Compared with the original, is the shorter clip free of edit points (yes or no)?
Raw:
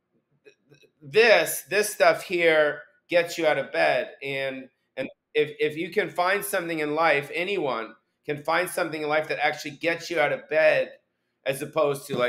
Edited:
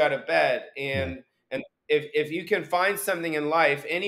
yes